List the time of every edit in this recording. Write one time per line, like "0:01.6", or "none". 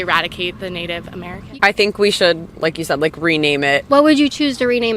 0:01.5
0:03.8